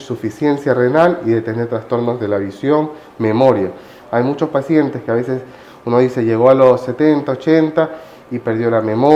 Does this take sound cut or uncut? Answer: uncut